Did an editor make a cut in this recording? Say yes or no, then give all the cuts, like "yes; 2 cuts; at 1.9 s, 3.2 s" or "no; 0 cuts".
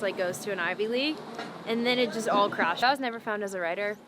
yes; 1 cut; at 2.8 s